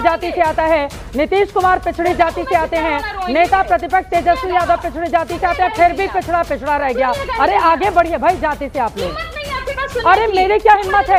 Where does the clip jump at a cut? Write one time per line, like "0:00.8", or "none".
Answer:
none